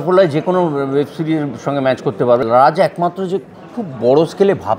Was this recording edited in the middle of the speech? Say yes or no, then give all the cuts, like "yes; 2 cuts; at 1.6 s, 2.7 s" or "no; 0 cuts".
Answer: yes; 1 cut; at 2.4 s